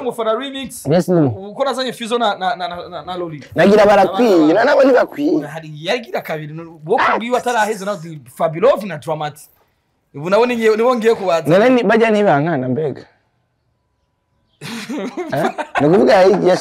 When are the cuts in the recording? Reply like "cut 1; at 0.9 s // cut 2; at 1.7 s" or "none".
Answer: none